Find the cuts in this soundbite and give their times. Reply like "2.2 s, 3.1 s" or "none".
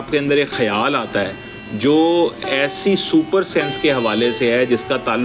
none